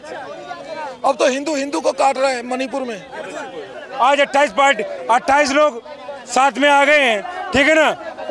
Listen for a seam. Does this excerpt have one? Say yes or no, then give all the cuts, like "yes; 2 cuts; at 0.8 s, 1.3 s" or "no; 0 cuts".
yes; 1 cut; at 3.8 s